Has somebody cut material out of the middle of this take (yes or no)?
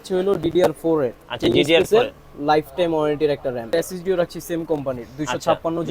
yes